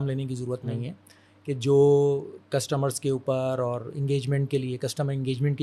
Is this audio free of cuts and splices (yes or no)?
yes